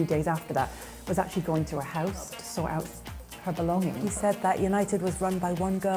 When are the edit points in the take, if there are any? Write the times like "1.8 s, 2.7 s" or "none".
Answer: 2.4 s, 4.0 s

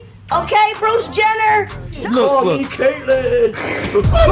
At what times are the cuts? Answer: 1.9 s

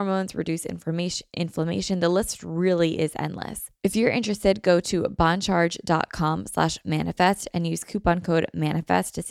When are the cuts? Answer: 3.6 s

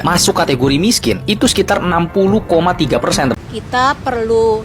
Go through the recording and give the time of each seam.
3.3 s

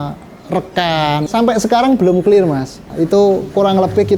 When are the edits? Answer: 1.2 s

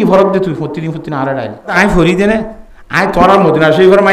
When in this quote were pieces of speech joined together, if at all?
1.8 s

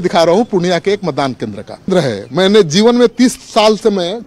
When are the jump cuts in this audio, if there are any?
1.9 s

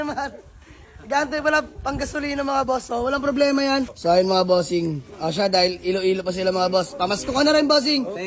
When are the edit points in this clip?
3.9 s

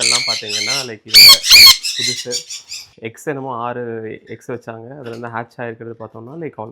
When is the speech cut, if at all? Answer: 2.8 s

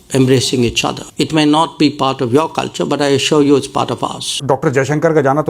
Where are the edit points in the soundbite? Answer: 1.0 s, 4.4 s

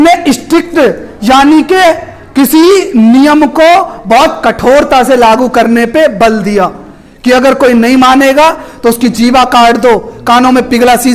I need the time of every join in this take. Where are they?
none

